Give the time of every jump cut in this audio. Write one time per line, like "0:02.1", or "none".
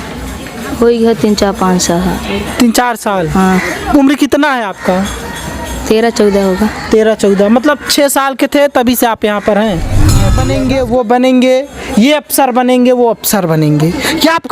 0:10.4